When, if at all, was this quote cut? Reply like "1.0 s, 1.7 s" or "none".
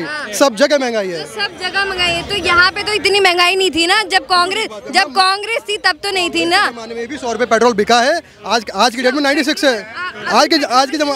none